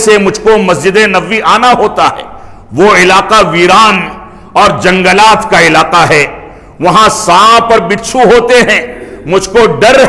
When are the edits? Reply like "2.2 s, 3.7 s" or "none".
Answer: none